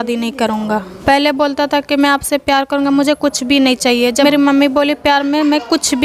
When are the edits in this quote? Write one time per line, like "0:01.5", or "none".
0:01.0
0:04.2